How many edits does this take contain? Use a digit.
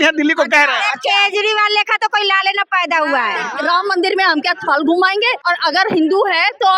2